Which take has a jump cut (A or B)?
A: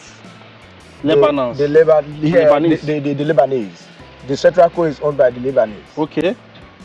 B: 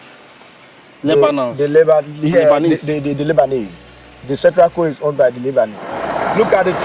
B